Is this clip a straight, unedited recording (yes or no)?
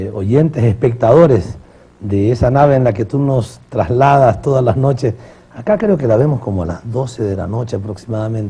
no